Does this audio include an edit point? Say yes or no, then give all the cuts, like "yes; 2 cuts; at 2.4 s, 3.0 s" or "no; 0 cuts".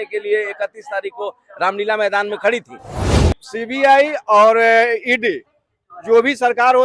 yes; 1 cut; at 3.0 s